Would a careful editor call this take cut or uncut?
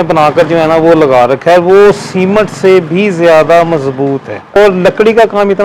cut